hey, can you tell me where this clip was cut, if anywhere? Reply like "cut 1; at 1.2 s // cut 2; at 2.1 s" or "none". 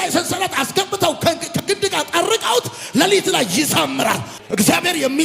cut 1; at 4.3 s